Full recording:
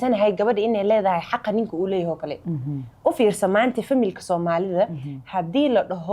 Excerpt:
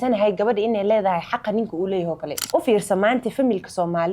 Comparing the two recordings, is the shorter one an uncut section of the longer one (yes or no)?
no